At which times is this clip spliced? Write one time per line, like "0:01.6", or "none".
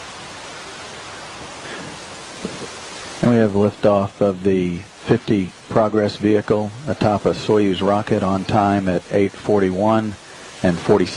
none